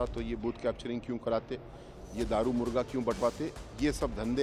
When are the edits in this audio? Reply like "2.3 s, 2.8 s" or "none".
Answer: none